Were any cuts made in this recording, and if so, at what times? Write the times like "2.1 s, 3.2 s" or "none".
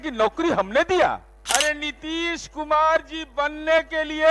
1.3 s